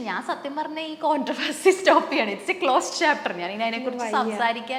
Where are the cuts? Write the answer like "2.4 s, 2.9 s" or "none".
none